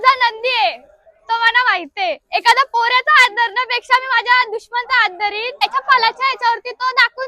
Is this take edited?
yes; 1 cut; at 5.6 s

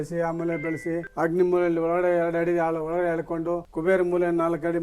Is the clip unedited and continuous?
no; 2 cuts; at 1.1 s, 3.7 s

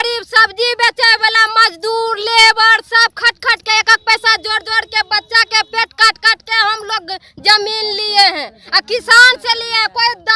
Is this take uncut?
yes; 0 cuts

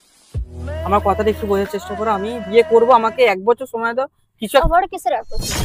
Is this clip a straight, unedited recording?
yes; 0 cuts

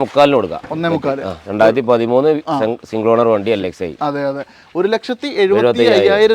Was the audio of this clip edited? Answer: no; 0 cuts

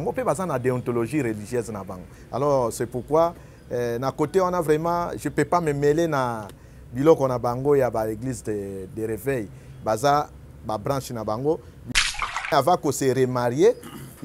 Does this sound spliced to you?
yes; 1 cut; at 11.8 s

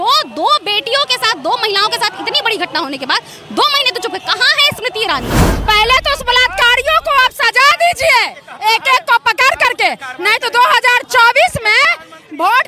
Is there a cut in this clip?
yes; 1 cut; at 5.4 s

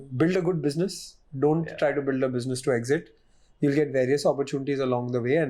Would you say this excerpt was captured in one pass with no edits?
yes; 0 cuts

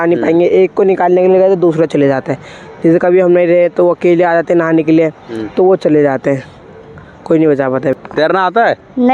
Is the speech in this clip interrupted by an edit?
yes; 1 cut; at 7.9 s

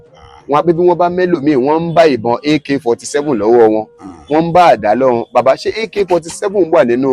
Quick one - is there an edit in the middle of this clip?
no; 0 cuts

